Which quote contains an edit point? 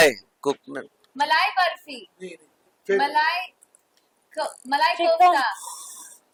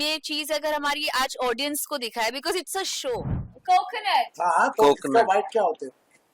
second; 1 cut; at 3.5 s

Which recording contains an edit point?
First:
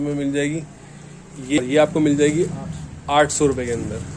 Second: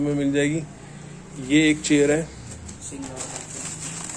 first; 1 cut; at 1.6 s

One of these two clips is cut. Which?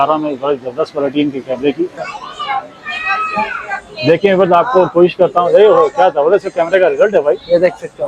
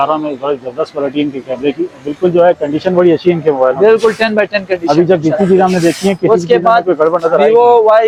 first; 1 cut; at 2.0 s

